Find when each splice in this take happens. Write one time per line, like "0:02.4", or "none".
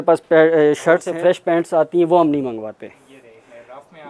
0:01.1

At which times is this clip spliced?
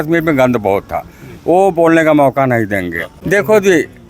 0:03.2

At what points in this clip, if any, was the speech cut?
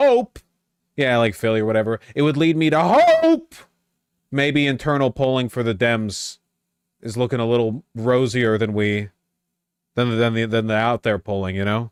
none

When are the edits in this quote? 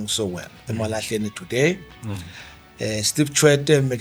none

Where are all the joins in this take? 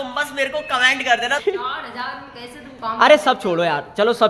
0:01.4

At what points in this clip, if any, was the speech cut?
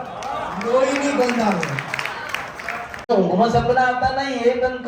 0:02.7

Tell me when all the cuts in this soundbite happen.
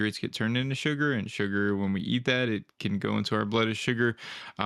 none

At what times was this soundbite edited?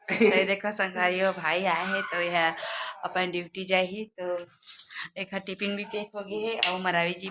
none

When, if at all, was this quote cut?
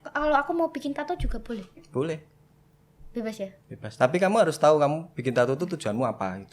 none

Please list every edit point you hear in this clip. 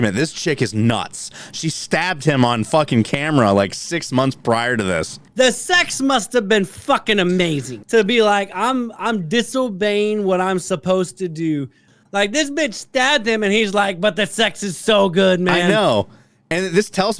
0:05.2
0:07.8
0:11.9

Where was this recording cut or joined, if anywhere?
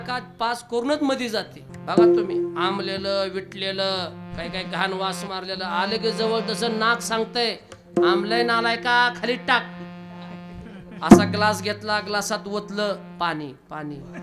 0:01.6

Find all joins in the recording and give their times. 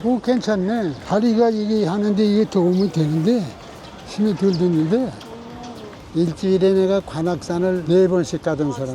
0:01.0
0:05.9

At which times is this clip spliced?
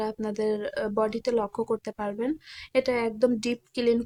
none

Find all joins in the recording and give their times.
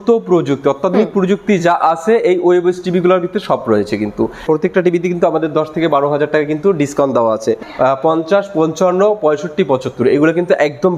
0:04.4
0:07.6

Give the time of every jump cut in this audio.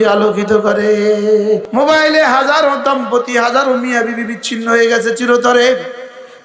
0:01.7

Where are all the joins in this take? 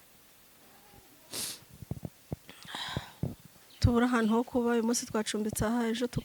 0:03.4

